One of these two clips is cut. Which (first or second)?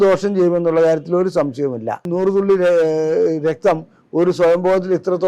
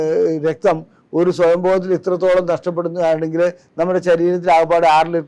first